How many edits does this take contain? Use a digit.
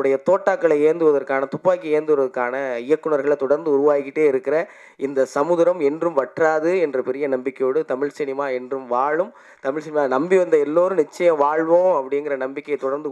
0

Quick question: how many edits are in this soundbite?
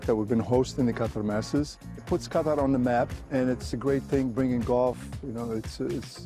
2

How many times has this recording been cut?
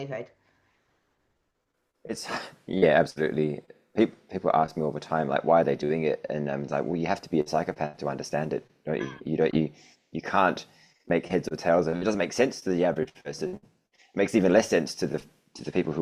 0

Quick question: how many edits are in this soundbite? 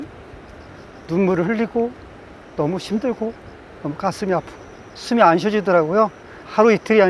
0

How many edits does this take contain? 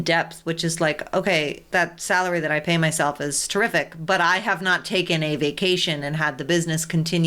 1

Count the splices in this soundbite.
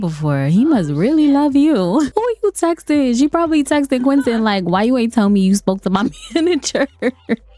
1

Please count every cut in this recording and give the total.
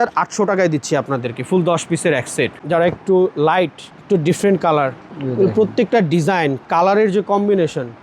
2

